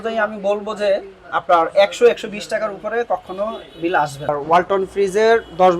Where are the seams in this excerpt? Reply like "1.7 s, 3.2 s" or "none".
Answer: 4.3 s

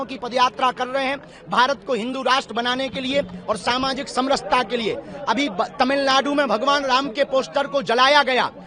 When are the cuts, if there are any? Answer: none

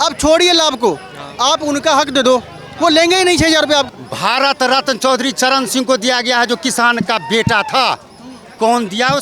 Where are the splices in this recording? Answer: 4.0 s

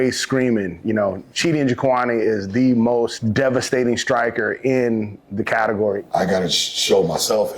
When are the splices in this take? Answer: 3.2 s, 6.0 s

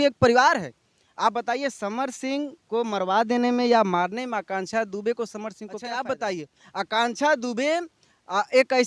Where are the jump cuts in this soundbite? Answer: 5.8 s

